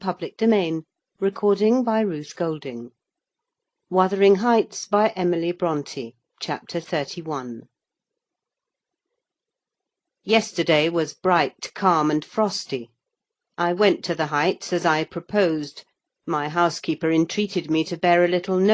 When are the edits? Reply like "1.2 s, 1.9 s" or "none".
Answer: 14.8 s